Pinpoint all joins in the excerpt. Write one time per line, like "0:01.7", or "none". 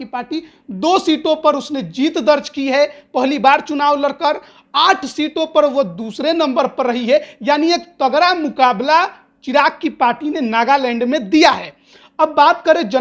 none